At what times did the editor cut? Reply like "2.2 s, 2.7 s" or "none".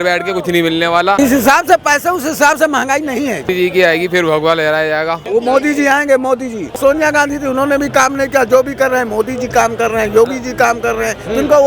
1.2 s, 3.5 s, 5.2 s, 6.8 s

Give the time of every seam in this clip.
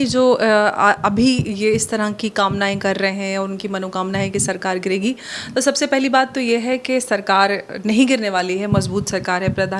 none

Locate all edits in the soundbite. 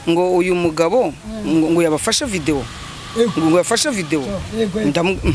none

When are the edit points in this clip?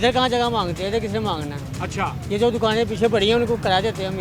none

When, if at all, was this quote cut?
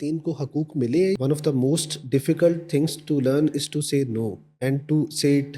1.2 s, 4.4 s

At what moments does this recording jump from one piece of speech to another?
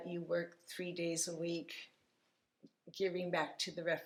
none

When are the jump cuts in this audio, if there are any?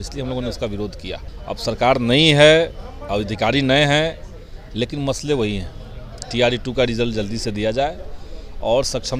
1.3 s

